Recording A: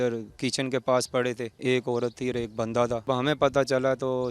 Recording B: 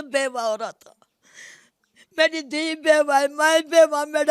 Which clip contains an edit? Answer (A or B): A